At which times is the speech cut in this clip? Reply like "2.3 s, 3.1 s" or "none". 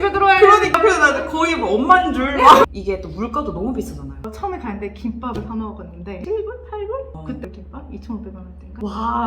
2.7 s, 4.2 s, 6.2 s